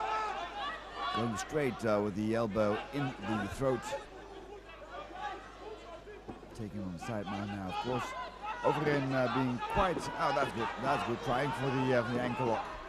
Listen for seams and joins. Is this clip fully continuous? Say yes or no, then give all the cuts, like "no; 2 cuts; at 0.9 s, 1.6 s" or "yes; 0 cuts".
yes; 0 cuts